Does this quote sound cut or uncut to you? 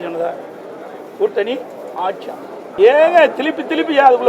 cut